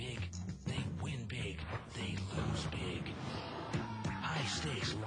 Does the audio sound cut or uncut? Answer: uncut